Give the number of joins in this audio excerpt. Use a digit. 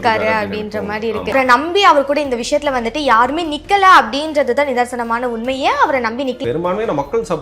2